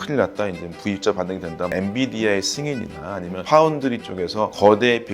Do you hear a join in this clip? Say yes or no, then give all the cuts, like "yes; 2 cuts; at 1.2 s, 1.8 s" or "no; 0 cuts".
yes; 1 cut; at 1.7 s